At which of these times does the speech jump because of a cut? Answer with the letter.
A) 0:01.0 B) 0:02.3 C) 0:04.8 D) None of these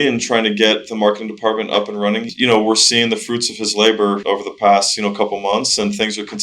B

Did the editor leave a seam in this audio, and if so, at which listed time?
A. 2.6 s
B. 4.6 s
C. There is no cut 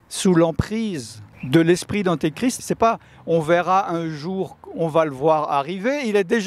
A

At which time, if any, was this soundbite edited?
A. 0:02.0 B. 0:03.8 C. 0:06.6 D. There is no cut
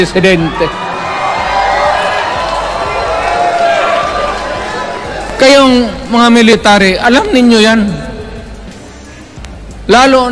D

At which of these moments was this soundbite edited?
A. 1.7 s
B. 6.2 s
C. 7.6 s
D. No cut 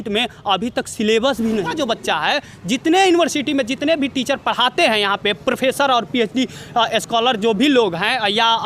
A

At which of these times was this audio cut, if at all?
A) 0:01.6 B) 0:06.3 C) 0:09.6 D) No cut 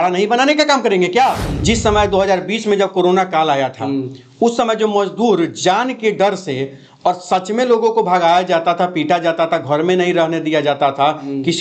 A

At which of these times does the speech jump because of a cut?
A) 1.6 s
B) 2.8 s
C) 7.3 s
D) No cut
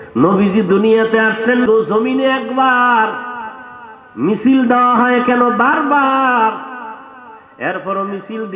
A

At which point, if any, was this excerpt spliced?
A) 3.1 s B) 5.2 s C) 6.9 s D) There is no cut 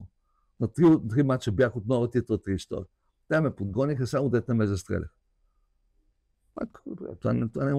D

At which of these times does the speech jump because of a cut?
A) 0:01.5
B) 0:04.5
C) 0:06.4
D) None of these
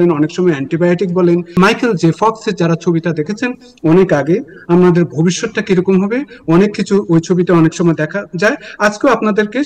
A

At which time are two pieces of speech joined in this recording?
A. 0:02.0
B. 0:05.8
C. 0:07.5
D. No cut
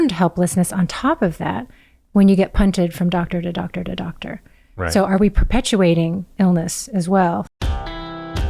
C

